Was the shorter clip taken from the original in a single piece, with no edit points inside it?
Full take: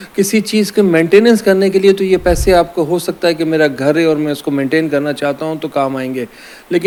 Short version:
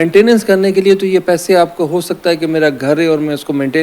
yes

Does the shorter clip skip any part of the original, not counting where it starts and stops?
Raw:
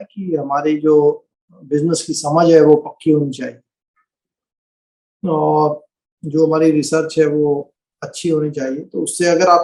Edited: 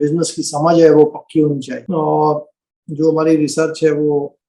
yes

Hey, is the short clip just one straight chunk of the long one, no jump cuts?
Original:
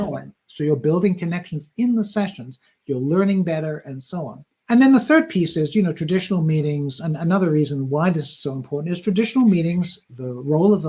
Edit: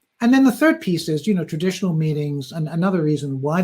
yes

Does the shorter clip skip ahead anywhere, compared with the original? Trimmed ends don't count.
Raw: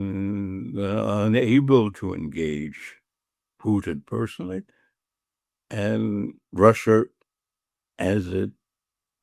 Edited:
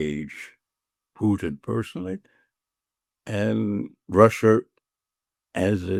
no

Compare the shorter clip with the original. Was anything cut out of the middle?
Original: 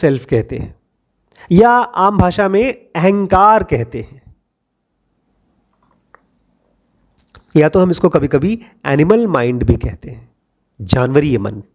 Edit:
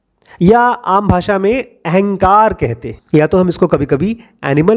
yes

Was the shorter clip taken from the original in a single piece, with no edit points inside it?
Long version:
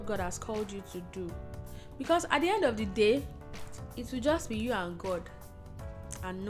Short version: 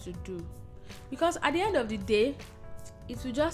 yes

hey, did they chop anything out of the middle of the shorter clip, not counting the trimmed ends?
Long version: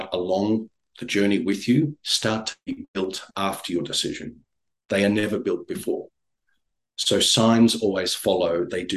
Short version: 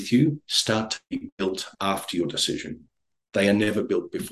no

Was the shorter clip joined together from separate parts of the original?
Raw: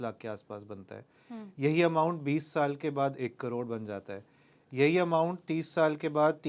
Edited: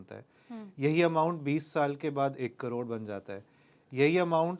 no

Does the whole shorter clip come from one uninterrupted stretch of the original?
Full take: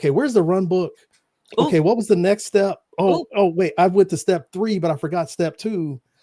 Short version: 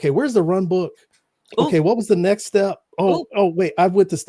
yes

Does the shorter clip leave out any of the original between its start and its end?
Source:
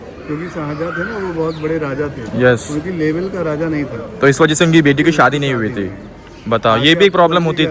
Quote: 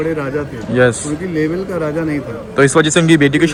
no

